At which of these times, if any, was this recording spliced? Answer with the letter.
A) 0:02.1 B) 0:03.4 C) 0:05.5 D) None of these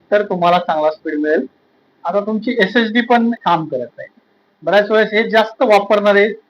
B